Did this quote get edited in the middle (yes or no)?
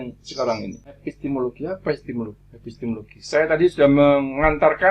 yes